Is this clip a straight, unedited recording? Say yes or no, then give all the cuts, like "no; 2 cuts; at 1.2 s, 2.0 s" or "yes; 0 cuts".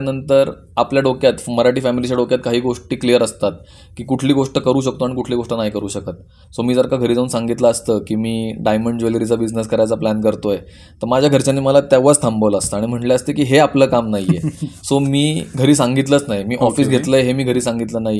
yes; 0 cuts